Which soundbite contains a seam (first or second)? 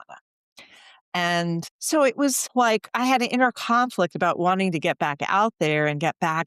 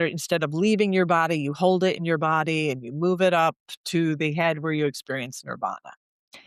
first